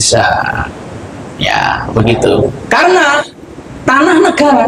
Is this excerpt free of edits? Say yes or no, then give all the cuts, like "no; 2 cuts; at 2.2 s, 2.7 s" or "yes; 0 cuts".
yes; 0 cuts